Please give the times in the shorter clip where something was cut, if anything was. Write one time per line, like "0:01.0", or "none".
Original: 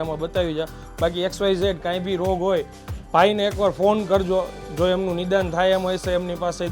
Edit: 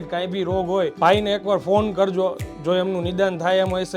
0:00.9